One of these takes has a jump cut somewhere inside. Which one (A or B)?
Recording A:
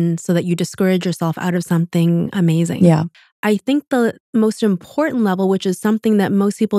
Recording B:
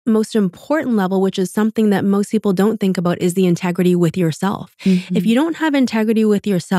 A